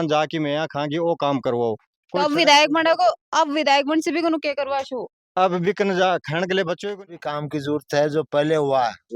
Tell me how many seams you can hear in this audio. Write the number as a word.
one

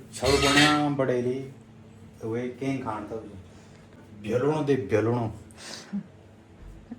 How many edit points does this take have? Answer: one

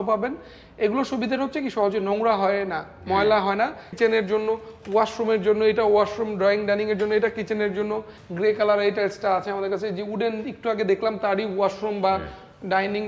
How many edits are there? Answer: two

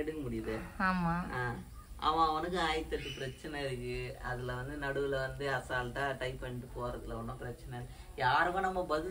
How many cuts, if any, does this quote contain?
zero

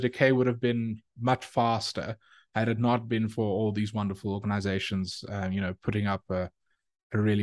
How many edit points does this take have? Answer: zero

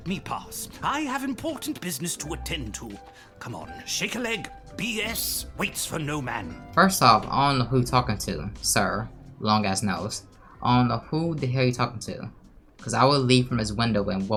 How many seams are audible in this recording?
zero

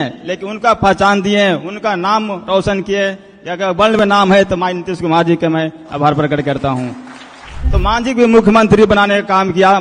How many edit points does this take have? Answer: one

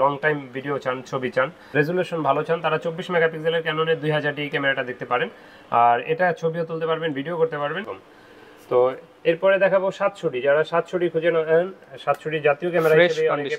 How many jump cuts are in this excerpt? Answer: two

